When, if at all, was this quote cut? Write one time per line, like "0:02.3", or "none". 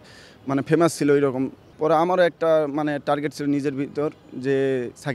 0:01.6